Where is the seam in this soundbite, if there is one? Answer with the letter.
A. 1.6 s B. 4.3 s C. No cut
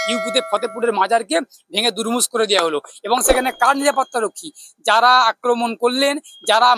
C